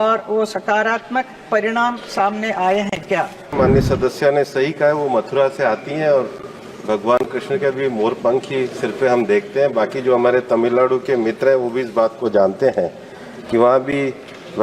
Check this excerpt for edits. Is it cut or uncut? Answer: cut